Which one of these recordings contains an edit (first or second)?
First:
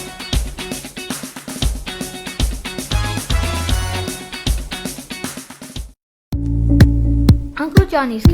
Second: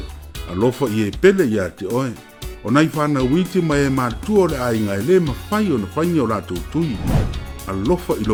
first